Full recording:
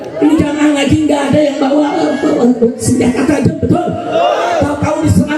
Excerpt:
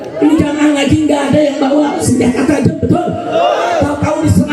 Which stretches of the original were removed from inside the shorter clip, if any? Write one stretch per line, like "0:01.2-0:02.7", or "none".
0:02.0-0:02.8